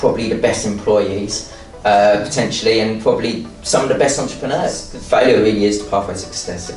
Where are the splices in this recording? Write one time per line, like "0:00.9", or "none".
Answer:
0:04.9